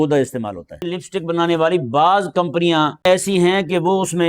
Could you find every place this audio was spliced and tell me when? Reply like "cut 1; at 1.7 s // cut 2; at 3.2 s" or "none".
cut 1; at 1.0 s // cut 2; at 3.1 s

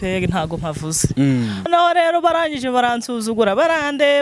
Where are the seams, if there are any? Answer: cut 1; at 1.7 s

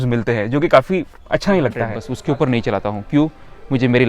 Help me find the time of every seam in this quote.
cut 1; at 2.0 s

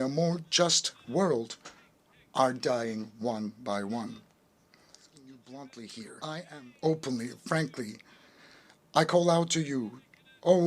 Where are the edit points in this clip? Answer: cut 1; at 5.3 s

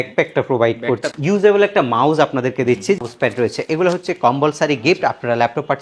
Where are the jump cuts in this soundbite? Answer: cut 1; at 1.0 s // cut 2; at 3.0 s

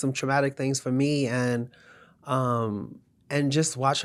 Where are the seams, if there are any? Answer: none

